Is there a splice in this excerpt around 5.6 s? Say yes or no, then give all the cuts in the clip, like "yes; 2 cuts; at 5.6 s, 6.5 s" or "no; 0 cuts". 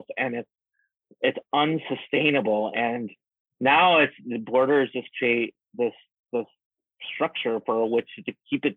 no; 0 cuts